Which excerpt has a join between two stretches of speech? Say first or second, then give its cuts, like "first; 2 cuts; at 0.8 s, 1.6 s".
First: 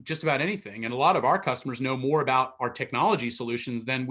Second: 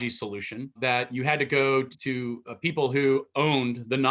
second; 2 cuts; at 0.8 s, 1.9 s